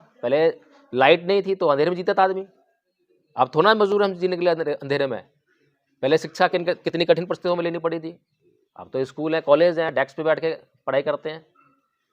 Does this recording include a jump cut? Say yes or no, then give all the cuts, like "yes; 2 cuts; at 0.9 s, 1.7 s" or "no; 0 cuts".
no; 0 cuts